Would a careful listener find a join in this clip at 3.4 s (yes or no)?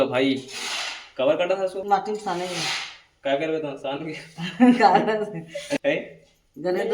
no